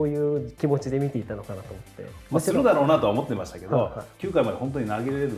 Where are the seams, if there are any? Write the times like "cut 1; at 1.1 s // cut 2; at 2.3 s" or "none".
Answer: cut 1; at 2.1 s